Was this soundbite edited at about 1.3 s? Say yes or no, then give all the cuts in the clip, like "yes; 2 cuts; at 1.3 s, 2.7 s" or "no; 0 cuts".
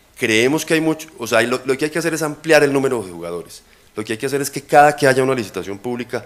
yes; 1 cut; at 1.3 s